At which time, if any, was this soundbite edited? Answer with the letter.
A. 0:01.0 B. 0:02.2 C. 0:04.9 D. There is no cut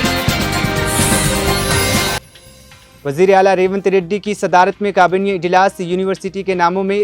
B